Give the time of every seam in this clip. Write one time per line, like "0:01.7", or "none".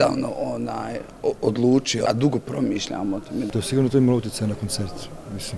0:02.1
0:03.5

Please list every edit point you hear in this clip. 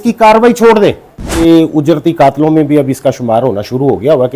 0:01.4

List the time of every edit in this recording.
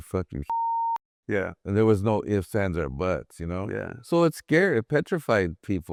none

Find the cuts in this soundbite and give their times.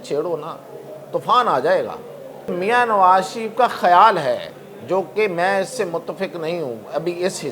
0:02.5

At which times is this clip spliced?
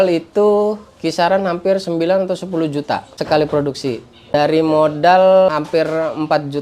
0:03.1
0:04.3
0:05.5

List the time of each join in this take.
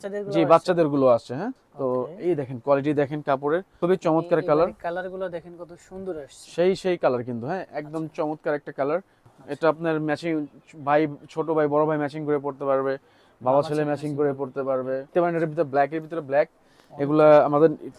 0:01.6
0:03.7
0:09.3
0:15.1

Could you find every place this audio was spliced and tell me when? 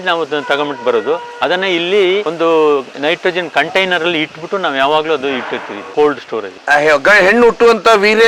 0:02.3
0:02.9

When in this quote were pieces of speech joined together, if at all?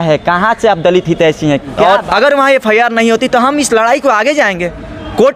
0:01.8

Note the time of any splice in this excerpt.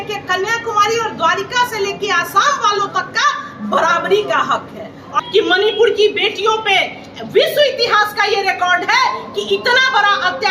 0:05.1

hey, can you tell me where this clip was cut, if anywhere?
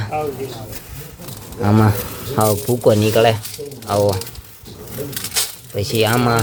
none

